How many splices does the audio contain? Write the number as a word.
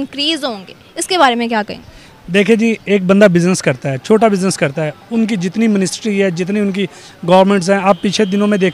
zero